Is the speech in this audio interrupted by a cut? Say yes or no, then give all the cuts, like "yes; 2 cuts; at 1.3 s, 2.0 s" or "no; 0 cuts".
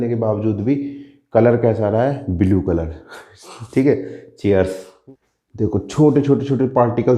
yes; 1 cut; at 4.9 s